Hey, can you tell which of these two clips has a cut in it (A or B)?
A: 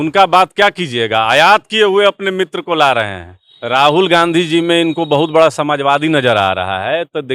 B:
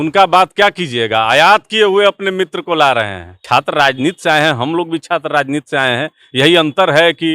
B